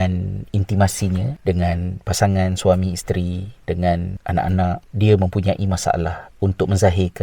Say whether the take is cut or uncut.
uncut